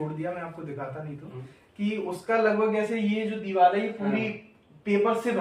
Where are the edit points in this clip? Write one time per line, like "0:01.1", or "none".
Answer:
none